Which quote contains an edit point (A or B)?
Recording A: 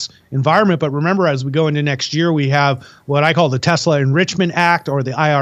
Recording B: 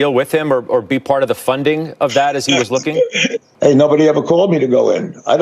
B